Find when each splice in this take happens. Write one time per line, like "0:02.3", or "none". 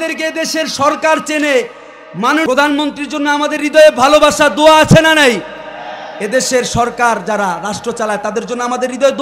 0:02.5

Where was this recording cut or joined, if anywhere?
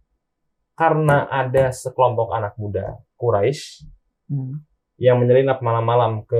none

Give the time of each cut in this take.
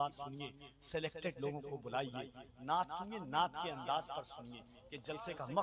none

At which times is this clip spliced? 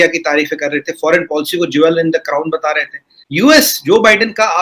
0:03.2

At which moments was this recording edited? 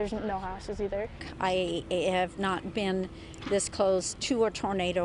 0:01.2

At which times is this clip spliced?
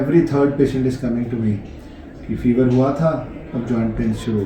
none

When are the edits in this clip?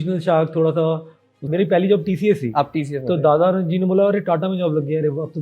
0:01.4

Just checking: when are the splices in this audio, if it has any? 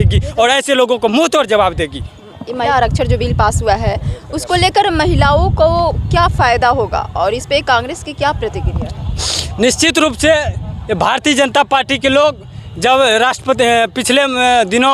none

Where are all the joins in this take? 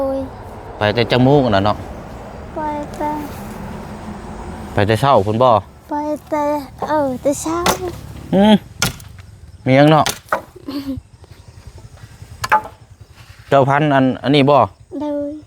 0:07.6

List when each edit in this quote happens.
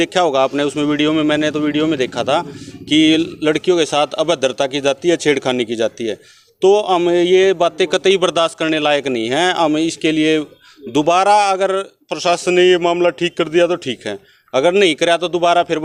none

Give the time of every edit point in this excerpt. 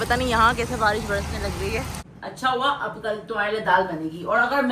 0:02.0

